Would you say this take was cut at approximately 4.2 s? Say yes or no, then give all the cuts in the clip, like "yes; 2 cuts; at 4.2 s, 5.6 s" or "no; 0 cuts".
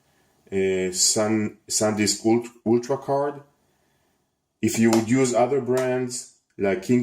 no; 1 cut; at 1.9 s